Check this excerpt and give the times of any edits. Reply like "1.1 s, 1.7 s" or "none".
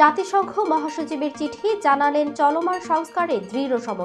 none